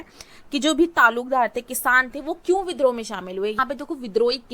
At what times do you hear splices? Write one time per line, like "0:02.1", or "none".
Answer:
0:03.6